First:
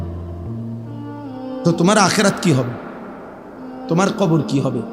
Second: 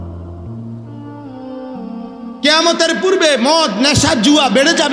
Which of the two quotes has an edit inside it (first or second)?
first